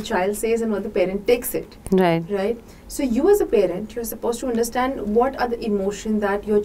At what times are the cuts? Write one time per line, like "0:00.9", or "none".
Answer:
none